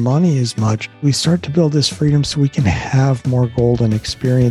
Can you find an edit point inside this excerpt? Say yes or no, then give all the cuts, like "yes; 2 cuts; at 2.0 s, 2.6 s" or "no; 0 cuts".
yes; 1 cut; at 1.0 s